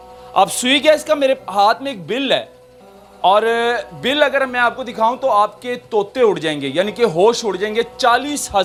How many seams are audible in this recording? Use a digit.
0